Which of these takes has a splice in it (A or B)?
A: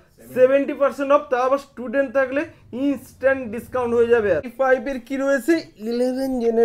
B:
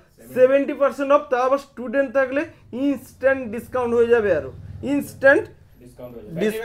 A